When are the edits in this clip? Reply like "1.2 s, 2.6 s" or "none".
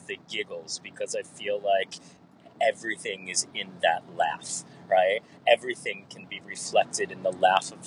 none